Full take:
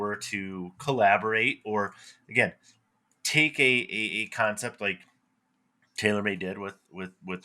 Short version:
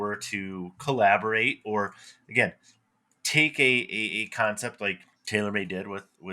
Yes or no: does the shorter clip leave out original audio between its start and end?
yes